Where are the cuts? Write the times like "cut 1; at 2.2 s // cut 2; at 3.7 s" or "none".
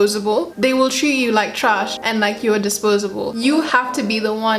cut 1; at 3.3 s